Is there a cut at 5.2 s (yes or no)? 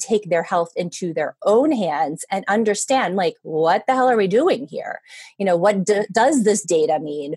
no